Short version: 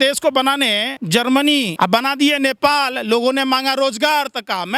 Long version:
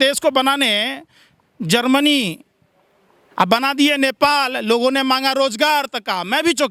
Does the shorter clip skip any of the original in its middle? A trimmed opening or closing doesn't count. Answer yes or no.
yes